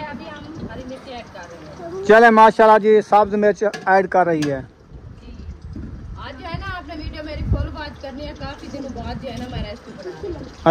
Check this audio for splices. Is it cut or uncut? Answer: uncut